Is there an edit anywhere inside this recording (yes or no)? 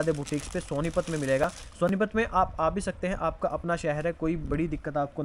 no